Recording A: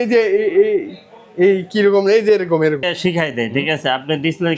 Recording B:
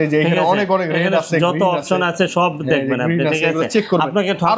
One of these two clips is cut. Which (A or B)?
A